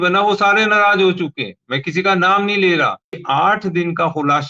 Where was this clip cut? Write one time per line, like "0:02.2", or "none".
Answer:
0:03.2